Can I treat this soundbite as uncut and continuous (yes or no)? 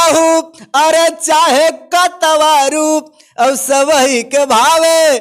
yes